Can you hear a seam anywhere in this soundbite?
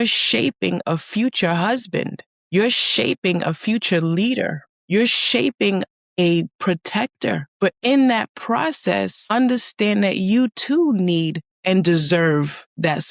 no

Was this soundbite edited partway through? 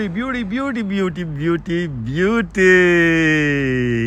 no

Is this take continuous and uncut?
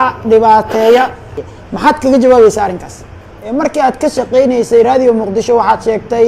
no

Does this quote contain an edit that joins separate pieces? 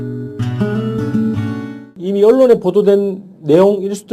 yes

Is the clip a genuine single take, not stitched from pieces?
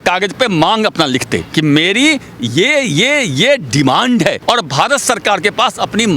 yes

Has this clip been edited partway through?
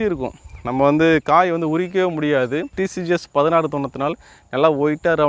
yes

